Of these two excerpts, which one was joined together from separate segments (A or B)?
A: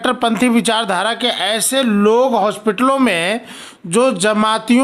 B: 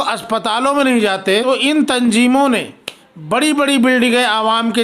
B